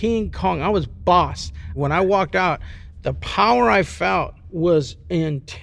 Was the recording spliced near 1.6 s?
yes; 2 cuts; at 1.6 s, 4.4 s

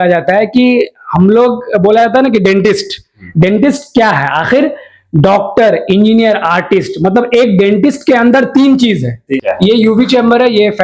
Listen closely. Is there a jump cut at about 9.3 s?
yes; 1 cut; at 9.3 s

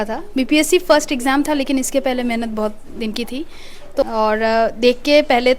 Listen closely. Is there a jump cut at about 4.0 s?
yes; 1 cut; at 4.0 s

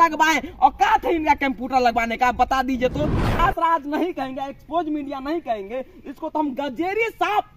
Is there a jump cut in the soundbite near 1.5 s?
no; 1 cut; at 3.4 s

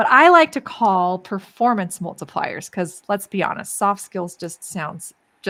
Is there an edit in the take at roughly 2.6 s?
no; 0 cuts

